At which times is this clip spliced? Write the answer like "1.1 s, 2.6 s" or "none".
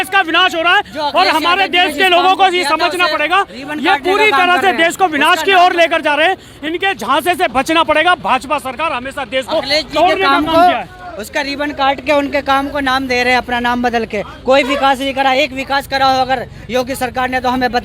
none